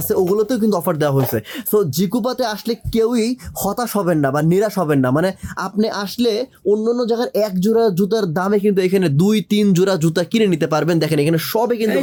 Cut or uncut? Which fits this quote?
uncut